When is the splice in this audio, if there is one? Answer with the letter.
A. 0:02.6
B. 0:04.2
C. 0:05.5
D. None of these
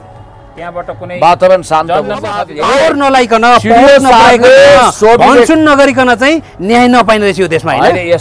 A